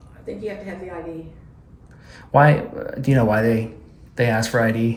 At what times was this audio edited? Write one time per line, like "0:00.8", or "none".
none